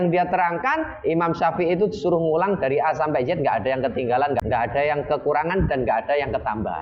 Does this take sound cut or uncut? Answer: cut